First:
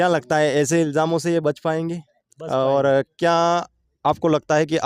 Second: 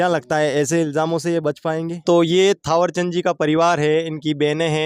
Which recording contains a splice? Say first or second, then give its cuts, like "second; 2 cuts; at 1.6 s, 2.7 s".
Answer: second; 1 cut; at 1.9 s